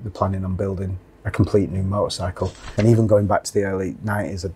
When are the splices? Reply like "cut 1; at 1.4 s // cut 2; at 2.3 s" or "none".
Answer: cut 1; at 2.7 s